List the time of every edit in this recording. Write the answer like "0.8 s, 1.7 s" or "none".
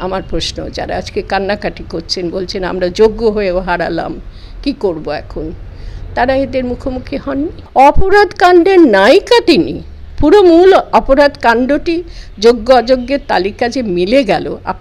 7.6 s